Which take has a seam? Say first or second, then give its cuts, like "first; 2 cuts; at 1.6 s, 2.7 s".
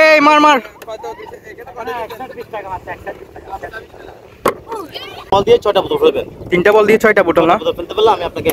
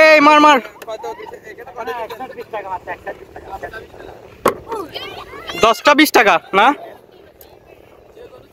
first; 1 cut; at 5.3 s